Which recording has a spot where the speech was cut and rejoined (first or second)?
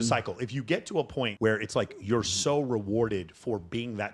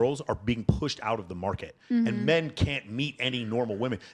first